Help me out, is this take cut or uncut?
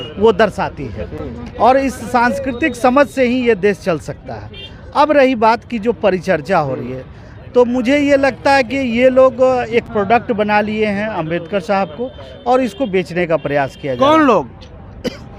uncut